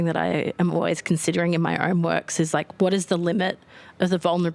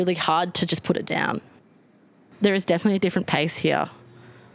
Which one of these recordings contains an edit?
second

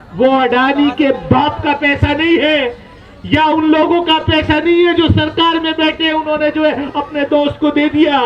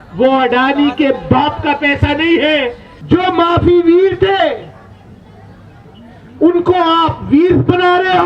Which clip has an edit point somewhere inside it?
second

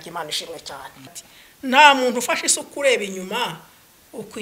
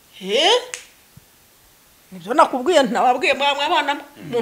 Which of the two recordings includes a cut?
first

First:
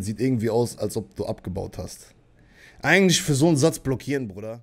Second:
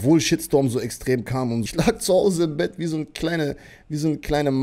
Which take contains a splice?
second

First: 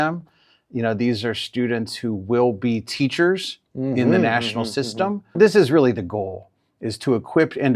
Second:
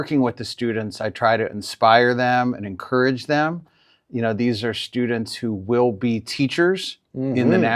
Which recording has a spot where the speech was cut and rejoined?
first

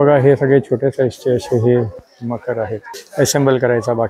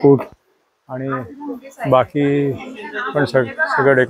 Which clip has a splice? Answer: first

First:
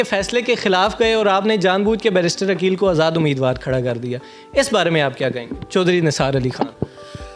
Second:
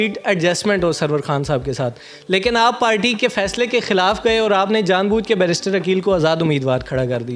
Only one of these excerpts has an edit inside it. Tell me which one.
first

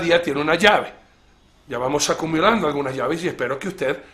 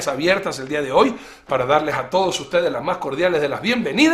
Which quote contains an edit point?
first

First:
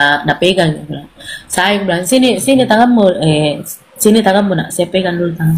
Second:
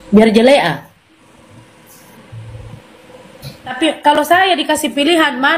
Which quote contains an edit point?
second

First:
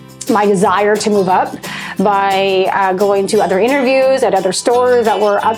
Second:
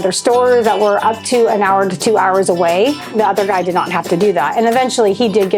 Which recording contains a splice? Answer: second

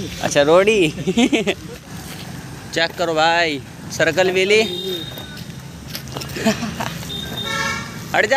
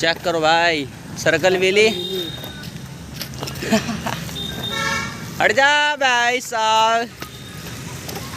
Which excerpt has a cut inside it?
first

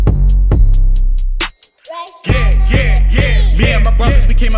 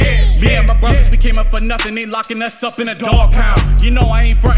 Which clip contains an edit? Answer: first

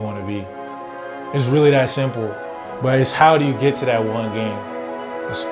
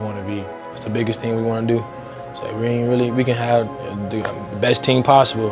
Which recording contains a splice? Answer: second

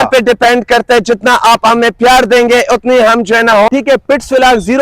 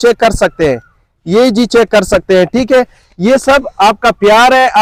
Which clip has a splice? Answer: first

